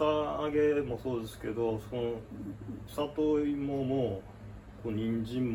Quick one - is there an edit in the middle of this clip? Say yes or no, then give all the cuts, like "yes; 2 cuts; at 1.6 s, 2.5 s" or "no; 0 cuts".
no; 0 cuts